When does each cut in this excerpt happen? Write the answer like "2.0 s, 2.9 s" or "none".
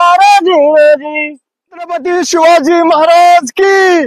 1.9 s